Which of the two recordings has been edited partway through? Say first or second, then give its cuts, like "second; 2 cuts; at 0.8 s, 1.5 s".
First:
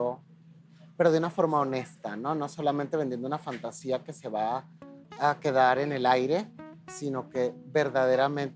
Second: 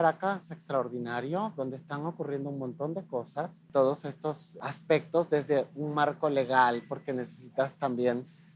second; 2 cuts; at 3.6 s, 4.5 s